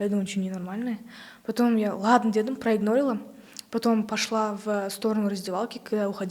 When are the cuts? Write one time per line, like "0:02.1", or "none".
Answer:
none